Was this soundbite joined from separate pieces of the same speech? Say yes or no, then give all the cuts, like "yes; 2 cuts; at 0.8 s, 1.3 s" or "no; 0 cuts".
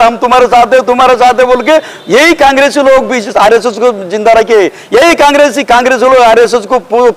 no; 0 cuts